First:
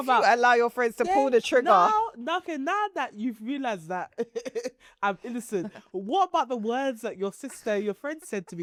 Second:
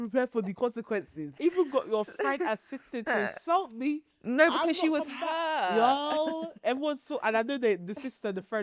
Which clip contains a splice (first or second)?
second